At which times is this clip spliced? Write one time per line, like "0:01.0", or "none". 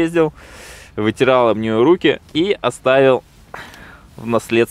none